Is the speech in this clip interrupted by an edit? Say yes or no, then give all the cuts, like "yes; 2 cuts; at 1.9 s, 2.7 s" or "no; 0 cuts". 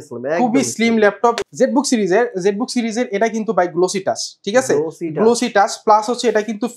yes; 1 cut; at 1.4 s